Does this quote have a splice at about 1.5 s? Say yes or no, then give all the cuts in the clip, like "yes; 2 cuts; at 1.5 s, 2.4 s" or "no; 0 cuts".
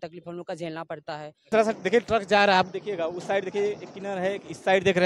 yes; 1 cut; at 1.5 s